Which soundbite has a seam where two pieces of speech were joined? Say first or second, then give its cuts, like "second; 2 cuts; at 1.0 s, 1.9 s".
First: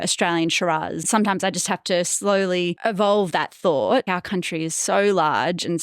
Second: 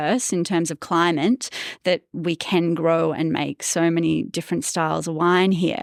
first; 3 cuts; at 1.0 s, 2.8 s, 4.1 s